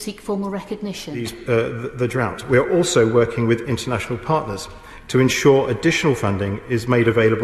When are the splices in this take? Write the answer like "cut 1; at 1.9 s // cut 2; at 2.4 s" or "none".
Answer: cut 1; at 1.4 s